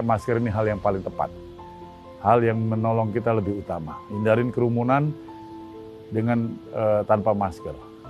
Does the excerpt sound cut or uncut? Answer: uncut